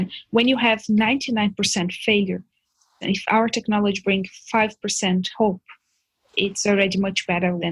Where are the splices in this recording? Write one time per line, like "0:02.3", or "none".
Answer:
none